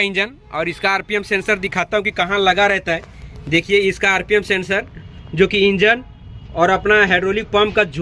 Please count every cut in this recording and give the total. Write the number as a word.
zero